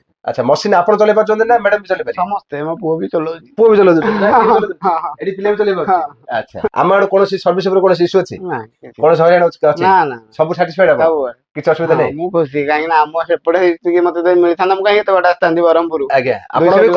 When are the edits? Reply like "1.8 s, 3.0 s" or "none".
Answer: 6.7 s